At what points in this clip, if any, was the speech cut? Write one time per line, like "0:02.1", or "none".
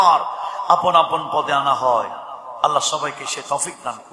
none